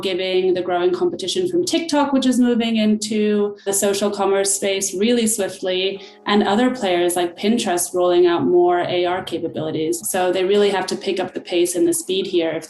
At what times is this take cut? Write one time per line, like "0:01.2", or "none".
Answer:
0:03.7
0:10.0